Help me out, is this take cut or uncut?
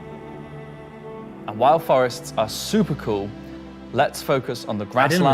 cut